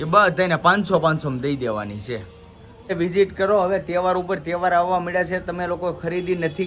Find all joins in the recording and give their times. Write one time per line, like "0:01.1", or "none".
0:02.9